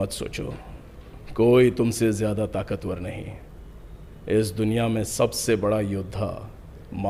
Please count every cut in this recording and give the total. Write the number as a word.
zero